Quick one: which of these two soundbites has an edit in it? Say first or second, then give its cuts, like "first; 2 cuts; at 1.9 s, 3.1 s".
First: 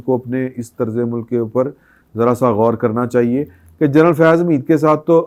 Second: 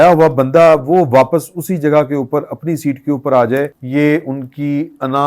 second; 1 cut; at 3.8 s